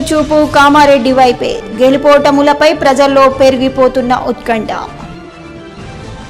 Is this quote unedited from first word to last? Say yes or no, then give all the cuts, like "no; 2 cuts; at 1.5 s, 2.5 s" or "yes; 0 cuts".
yes; 0 cuts